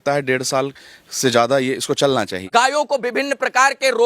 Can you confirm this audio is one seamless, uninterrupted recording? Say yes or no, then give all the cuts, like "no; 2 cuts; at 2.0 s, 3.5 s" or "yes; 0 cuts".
no; 1 cut; at 2.4 s